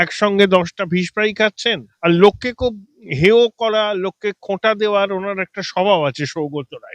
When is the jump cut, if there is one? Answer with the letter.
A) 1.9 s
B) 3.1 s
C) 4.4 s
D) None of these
A